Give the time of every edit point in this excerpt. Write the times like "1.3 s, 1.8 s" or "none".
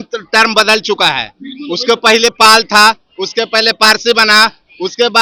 none